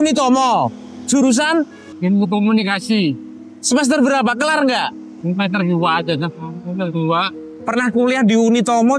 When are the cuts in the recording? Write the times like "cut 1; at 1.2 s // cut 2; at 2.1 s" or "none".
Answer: cut 1; at 7.3 s

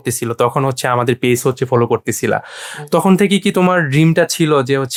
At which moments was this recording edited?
none

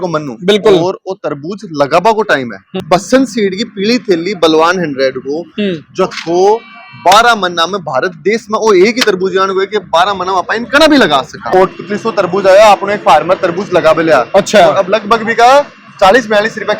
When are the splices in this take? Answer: cut 1; at 2.7 s // cut 2; at 11.5 s

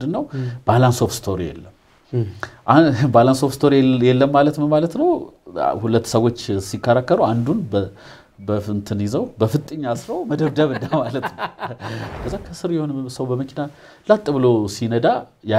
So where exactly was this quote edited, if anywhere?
cut 1; at 12.1 s

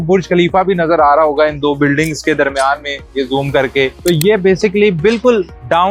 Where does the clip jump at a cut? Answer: none

